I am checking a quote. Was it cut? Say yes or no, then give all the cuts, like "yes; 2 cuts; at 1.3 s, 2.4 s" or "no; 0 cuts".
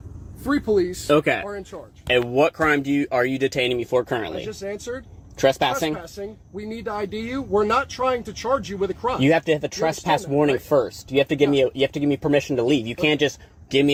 no; 0 cuts